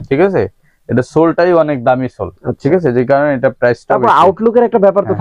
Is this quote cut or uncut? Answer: uncut